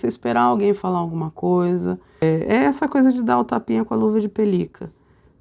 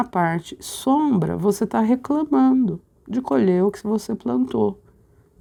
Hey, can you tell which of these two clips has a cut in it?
first; 1 cut; at 2.2 s

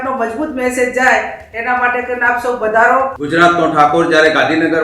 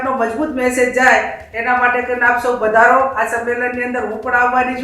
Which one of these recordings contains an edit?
first; 1 cut; at 3.1 s

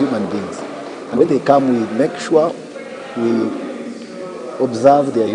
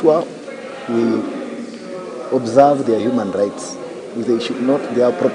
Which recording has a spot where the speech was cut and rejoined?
first; 1 cut; at 1.2 s

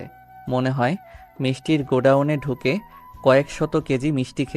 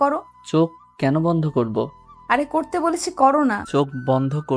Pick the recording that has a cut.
second; 1 cut; at 3.6 s

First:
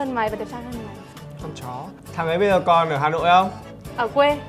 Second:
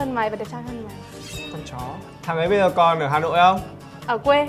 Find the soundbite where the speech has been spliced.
first; 1 cut; at 1.2 s

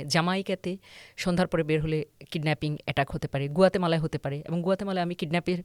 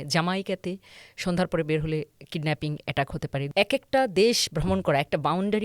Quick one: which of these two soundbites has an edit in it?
second; 1 cut; at 3.5 s

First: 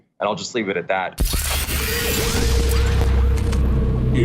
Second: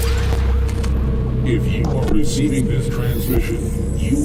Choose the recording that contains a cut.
first; 1 cut; at 1.3 s

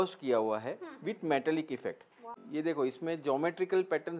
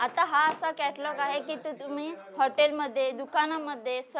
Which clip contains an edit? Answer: first; 1 cut; at 2.1 s

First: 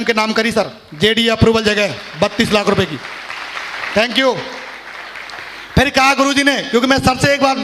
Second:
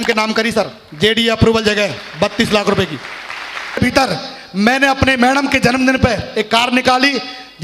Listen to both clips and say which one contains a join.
second; 1 cut; at 3.8 s

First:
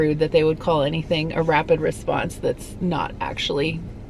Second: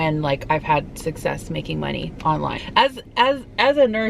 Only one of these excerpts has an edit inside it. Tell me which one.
second; 1 cut; at 2.6 s

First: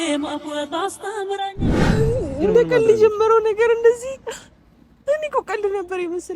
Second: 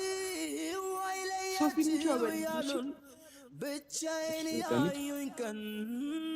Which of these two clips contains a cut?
first; 1 cut; at 1.8 s

